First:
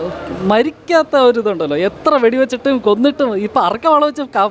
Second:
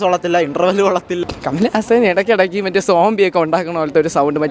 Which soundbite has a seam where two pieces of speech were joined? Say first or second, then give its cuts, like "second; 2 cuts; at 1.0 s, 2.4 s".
second; 1 cut; at 1.2 s